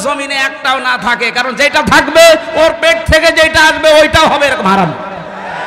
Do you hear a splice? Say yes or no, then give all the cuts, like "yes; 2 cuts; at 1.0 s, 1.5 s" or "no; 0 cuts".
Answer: no; 0 cuts